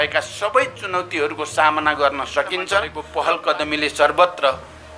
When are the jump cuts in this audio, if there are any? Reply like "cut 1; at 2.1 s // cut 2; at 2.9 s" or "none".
cut 1; at 3.0 s